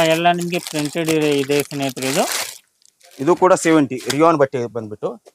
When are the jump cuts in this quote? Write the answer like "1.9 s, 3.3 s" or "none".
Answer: none